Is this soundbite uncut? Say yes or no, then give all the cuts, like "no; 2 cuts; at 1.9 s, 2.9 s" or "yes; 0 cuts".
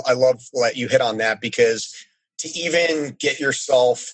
yes; 0 cuts